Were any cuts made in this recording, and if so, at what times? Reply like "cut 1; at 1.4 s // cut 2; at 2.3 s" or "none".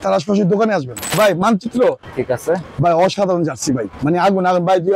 cut 1; at 1.1 s // cut 2; at 3.9 s